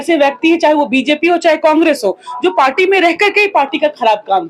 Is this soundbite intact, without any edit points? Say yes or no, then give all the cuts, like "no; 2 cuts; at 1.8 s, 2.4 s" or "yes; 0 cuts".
yes; 0 cuts